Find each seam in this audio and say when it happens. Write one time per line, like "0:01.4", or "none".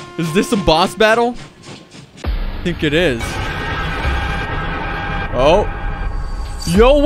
none